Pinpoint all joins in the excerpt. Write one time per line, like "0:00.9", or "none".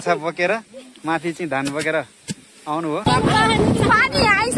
0:03.1